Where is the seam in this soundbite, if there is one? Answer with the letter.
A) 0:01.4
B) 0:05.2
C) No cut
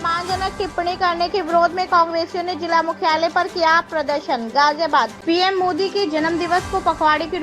B